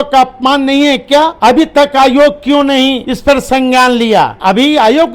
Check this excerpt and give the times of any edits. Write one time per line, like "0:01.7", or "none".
0:01.3
0:03.1
0:04.4